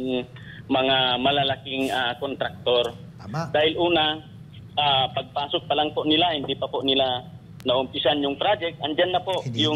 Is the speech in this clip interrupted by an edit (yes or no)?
no